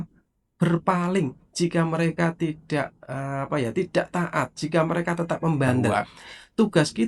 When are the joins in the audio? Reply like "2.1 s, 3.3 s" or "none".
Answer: 5.9 s